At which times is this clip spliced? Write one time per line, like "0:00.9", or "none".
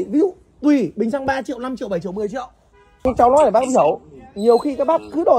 0:03.0

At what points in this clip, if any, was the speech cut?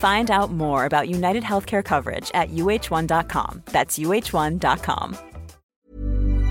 0:05.6

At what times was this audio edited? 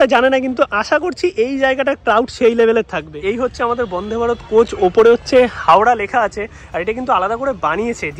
0:03.2

